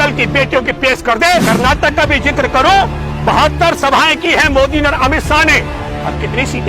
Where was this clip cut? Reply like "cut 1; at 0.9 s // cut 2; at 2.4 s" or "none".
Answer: cut 1; at 1.4 s